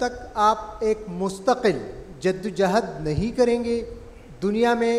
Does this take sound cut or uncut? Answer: uncut